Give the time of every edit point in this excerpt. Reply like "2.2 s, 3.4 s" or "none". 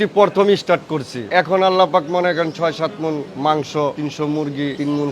1.1 s, 3.3 s, 4.4 s